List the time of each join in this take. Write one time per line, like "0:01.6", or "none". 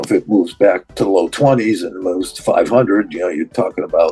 none

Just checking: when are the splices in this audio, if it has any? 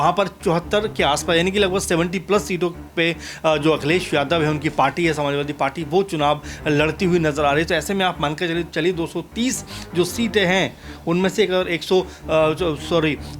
none

